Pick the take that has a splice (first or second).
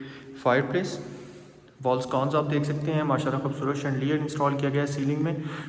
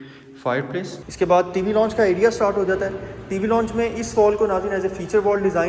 second